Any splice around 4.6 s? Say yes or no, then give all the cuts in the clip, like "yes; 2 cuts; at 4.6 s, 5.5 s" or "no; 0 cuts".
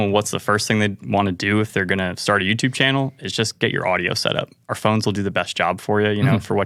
no; 0 cuts